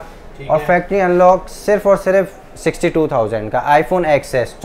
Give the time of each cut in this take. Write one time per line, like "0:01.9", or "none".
none